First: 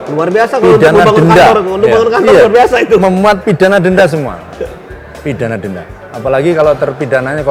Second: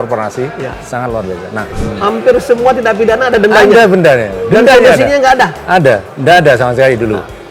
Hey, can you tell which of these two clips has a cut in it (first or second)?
second